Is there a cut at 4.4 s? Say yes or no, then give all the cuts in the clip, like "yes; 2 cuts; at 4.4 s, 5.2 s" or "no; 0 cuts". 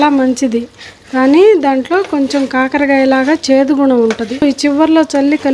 yes; 1 cut; at 4.4 s